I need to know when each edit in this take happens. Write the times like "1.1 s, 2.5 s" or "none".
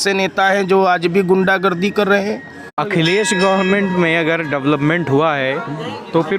2.8 s